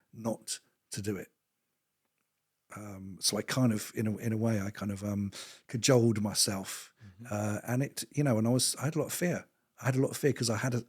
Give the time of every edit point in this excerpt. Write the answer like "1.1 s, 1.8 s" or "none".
none

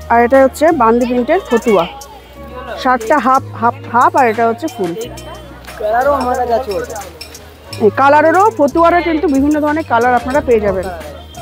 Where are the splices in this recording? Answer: none

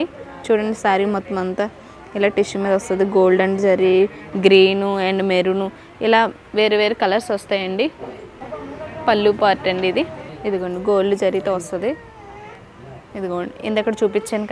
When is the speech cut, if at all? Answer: none

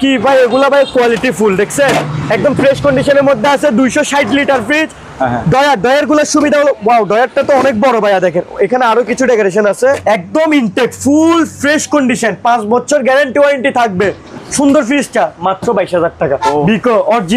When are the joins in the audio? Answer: 10.0 s, 14.3 s, 16.5 s

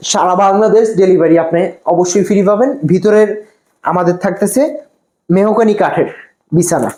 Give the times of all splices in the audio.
none

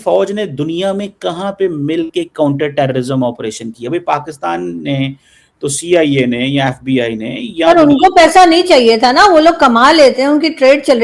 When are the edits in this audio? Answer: none

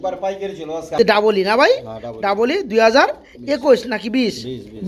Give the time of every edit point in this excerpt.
1.0 s

